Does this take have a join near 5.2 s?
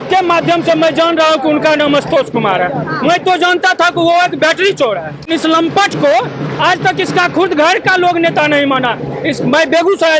yes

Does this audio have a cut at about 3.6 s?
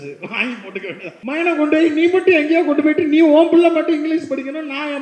no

